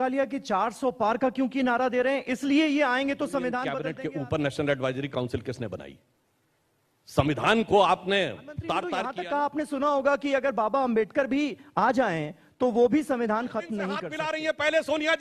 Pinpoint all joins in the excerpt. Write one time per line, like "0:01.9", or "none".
0:03.7
0:09.0
0:14.1